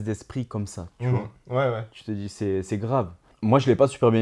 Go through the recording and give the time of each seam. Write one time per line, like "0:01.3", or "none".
0:03.2